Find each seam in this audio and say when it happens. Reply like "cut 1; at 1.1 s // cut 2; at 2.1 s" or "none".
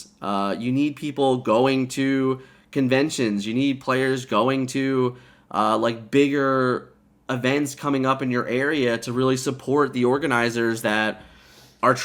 none